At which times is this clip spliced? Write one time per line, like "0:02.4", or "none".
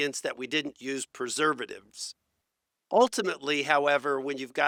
none